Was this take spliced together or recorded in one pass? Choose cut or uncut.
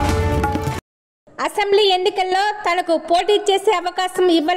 cut